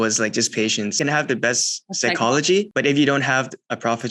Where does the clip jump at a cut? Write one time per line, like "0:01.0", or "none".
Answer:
0:01.0